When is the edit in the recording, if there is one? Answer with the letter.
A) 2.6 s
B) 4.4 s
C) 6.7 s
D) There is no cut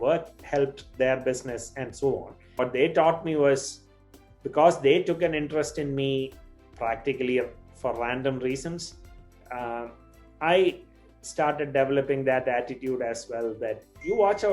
A